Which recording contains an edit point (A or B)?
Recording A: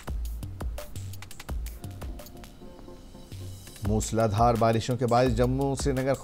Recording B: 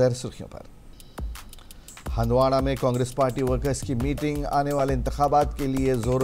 B